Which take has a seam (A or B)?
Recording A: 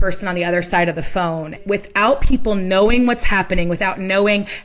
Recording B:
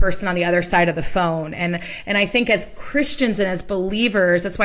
A